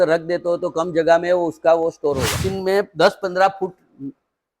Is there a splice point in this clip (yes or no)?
yes